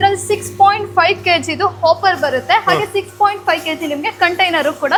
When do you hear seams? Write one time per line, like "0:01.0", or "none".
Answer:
none